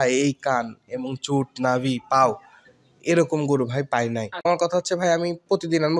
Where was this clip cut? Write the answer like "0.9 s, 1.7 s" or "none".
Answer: 4.5 s